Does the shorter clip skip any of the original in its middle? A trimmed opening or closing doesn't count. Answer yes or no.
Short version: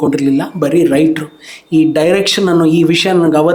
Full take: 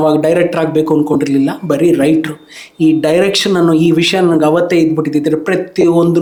no